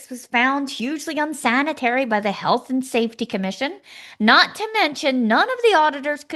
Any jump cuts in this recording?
no; 0 cuts

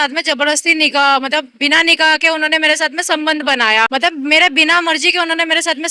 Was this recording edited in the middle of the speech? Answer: yes; 1 cut; at 3.9 s

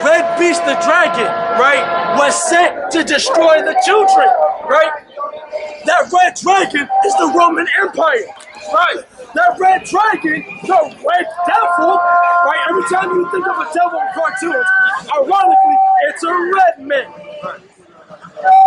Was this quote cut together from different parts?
no; 0 cuts

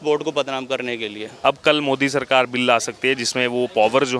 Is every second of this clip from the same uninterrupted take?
no; 1 cut; at 1.2 s

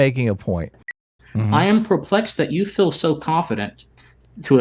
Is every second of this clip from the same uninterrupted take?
no; 1 cut; at 0.9 s

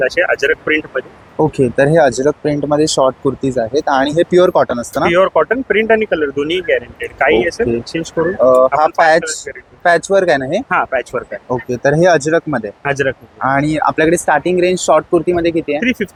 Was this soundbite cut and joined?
no; 0 cuts

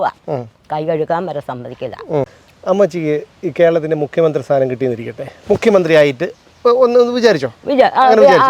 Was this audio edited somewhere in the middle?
yes; 1 cut; at 2.4 s

